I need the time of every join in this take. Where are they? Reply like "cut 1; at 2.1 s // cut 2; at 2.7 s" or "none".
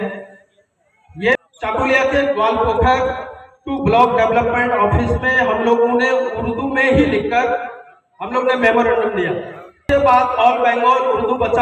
cut 1; at 1.4 s // cut 2; at 9.8 s

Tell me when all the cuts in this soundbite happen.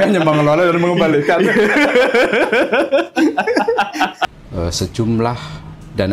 cut 1; at 4.2 s

